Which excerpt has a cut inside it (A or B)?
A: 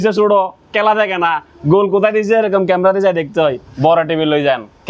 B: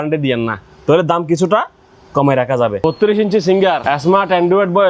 B